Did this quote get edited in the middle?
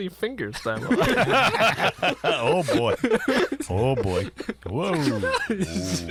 no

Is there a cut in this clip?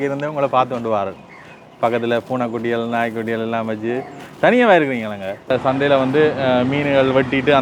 yes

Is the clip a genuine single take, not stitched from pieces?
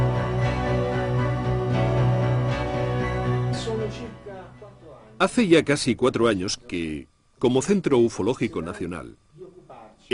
yes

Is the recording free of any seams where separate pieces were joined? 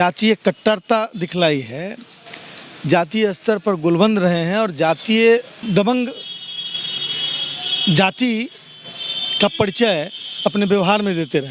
yes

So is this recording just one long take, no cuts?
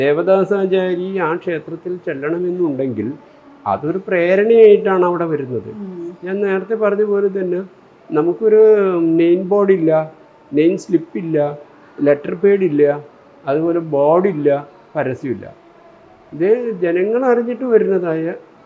yes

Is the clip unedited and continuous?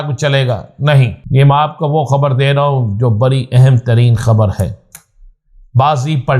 no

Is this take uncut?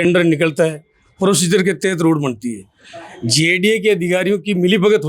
yes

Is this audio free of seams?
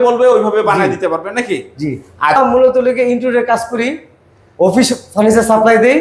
no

